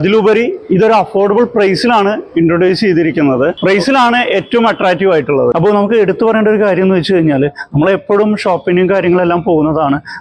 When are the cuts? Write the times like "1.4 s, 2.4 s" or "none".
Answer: 3.6 s, 5.5 s